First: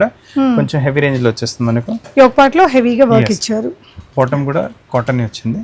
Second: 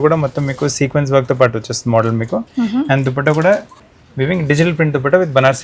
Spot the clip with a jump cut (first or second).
second